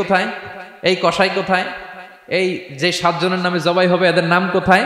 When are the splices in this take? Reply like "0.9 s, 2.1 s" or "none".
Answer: none